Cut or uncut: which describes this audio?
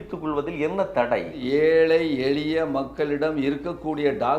cut